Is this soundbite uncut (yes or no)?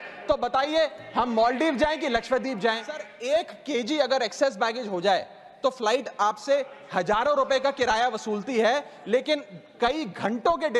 no